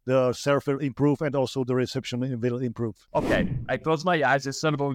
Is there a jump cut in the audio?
yes; 1 cut; at 3.0 s

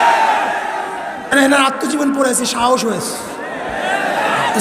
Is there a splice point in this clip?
yes; 1 cut; at 1.3 s

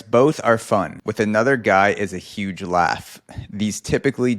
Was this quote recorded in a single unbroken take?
no; 1 cut; at 1.0 s

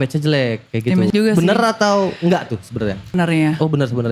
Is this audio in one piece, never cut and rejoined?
no; 2 cuts; at 1.1 s, 3.1 s

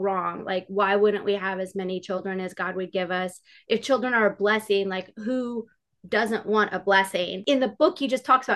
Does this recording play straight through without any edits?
no; 1 cut; at 7.4 s

